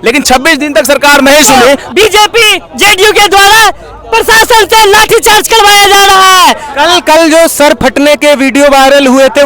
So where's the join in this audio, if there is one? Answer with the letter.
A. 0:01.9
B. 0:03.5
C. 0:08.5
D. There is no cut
A